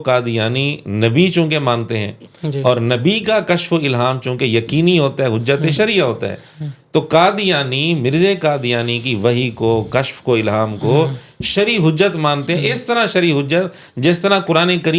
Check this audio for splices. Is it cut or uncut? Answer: uncut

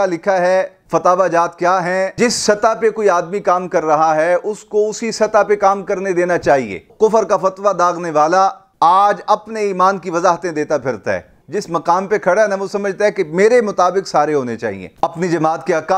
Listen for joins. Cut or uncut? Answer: cut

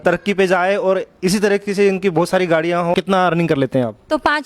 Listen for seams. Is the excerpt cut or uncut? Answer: cut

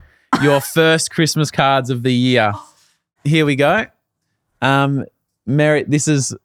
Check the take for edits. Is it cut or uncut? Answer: uncut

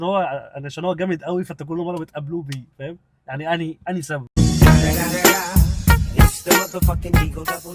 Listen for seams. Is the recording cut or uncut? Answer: uncut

